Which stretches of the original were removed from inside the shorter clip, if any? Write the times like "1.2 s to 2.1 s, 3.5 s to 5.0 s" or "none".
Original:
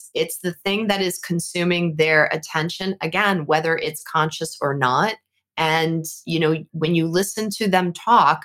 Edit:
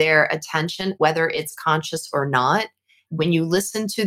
3.0 s to 3.4 s, 5.5 s to 6.7 s